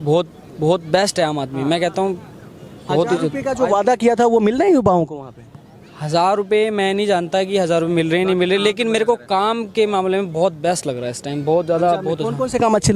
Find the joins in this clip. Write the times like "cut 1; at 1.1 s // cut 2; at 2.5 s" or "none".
none